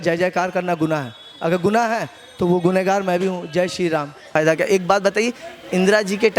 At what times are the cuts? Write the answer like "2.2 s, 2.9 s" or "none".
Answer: 4.3 s